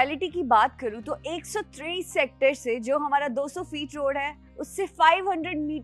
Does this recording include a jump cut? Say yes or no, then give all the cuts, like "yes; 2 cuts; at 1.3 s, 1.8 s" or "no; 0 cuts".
no; 0 cuts